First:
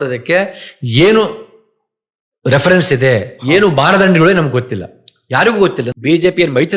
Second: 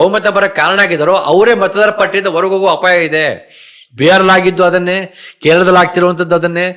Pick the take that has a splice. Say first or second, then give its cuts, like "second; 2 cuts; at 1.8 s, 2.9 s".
first; 1 cut; at 5.8 s